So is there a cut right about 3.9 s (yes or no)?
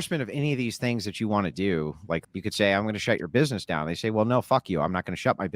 no